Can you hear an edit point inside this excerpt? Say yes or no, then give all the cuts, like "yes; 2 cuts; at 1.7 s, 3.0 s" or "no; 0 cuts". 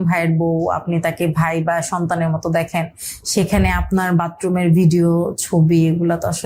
no; 0 cuts